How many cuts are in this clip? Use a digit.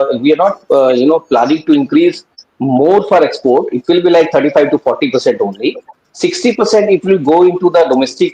0